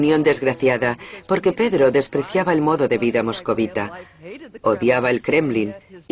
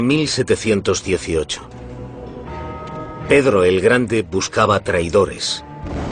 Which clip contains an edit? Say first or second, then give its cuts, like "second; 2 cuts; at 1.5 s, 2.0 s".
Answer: first; 1 cut; at 4.8 s